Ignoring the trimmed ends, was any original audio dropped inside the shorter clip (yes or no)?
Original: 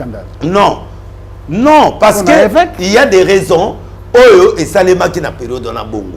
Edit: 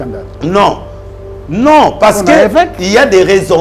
no